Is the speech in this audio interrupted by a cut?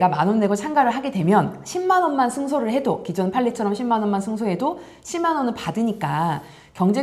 no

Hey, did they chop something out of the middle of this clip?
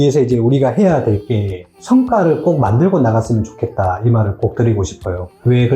yes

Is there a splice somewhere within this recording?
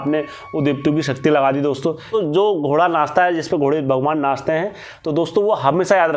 yes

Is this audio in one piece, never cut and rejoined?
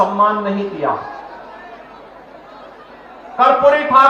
yes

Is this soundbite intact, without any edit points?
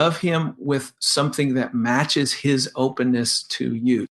yes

